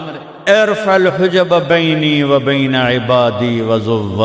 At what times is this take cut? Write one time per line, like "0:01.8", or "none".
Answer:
none